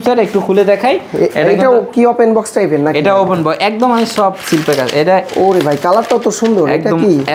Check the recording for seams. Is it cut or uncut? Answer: uncut